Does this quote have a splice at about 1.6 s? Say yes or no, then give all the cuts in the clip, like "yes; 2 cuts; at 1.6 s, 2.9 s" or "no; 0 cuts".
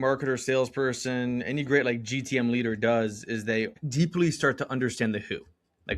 no; 1 cut; at 3.8 s